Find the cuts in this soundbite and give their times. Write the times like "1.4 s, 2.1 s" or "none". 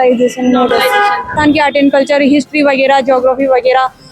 1.3 s